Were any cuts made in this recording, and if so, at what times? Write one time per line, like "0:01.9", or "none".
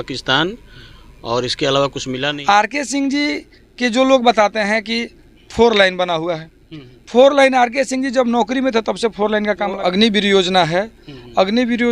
0:02.3
0:09.8